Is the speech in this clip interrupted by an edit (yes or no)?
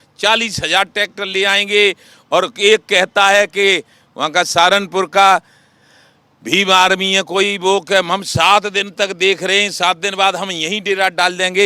no